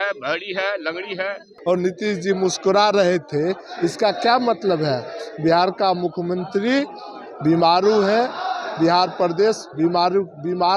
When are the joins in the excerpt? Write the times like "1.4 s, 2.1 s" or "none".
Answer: 1.5 s